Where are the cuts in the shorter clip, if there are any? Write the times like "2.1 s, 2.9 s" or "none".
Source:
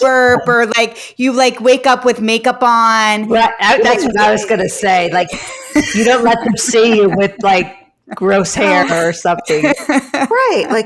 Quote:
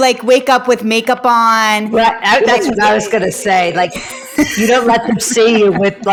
none